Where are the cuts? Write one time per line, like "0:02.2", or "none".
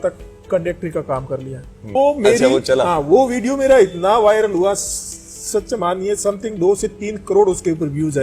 0:01.9